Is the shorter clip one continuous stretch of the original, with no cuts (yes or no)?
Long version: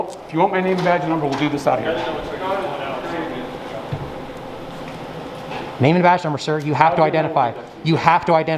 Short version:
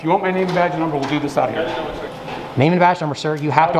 no